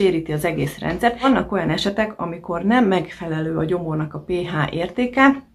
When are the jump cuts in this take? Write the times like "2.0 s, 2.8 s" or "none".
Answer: 1.2 s